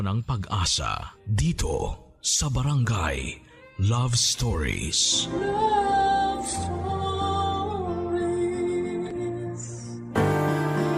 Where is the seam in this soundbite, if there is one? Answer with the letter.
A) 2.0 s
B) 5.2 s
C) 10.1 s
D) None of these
C